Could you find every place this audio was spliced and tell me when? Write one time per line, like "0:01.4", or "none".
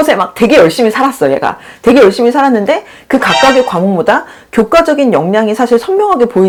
none